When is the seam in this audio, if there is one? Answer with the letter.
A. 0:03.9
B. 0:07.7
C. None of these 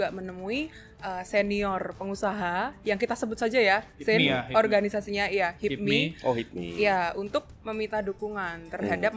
C